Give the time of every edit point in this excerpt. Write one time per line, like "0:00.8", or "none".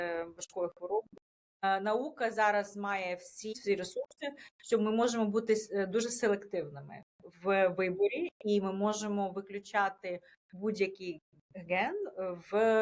0:01.6
0:03.6